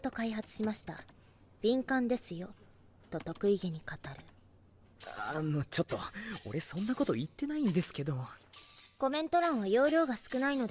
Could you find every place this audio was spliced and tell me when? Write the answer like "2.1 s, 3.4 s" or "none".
none